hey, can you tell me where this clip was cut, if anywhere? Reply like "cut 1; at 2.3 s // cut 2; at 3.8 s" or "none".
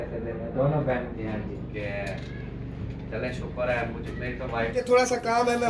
cut 1; at 1.1 s // cut 2; at 4.8 s